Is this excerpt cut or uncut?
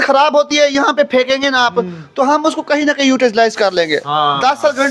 uncut